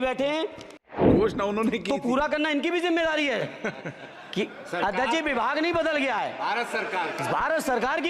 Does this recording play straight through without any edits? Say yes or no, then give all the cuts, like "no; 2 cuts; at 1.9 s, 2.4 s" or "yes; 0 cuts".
no; 1 cut; at 1.0 s